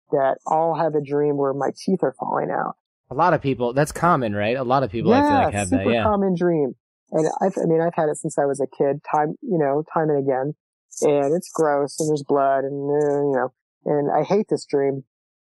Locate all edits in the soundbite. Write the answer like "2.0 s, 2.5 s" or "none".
none